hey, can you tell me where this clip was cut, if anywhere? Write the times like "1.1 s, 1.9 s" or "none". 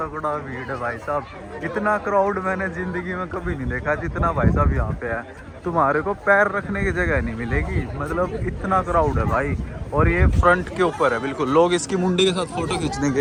none